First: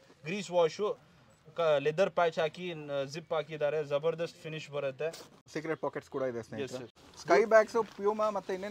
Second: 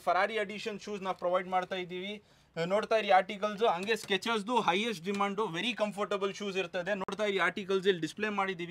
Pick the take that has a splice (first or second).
first